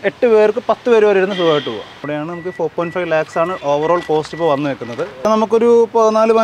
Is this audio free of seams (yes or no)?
no